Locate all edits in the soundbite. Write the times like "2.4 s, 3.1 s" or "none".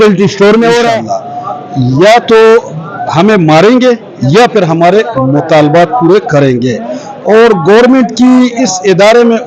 1.1 s